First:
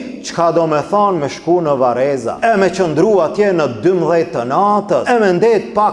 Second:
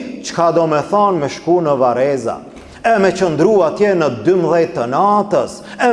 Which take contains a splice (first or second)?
first